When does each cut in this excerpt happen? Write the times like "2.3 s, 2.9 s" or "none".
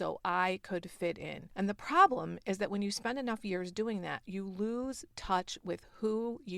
1.4 s